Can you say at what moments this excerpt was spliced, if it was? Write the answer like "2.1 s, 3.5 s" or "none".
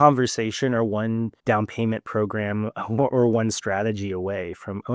1.4 s